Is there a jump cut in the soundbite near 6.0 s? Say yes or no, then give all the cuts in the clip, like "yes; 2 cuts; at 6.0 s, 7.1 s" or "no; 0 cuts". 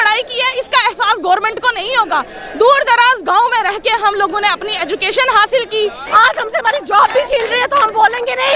yes; 1 cut; at 6.0 s